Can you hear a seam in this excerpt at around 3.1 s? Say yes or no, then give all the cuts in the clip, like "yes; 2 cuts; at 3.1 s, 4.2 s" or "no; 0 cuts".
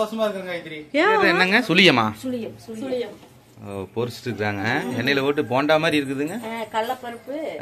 no; 1 cut; at 1.3 s